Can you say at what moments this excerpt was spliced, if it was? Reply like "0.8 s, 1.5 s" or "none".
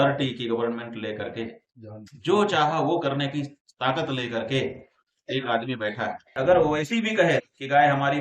6.3 s

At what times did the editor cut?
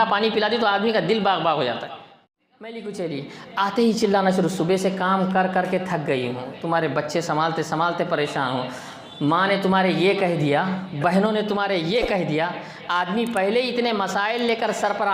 2.2 s

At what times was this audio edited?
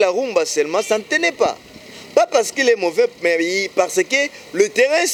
none

